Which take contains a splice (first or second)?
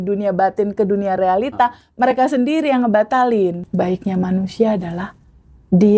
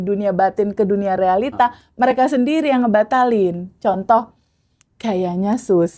first